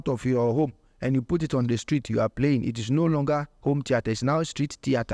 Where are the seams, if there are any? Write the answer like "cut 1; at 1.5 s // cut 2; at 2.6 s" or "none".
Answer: none